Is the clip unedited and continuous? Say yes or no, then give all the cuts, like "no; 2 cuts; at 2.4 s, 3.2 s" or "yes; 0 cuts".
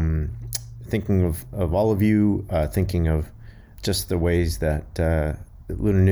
no; 1 cut; at 3.7 s